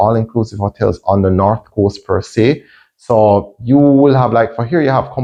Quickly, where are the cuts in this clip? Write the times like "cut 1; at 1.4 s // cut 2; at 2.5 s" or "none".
none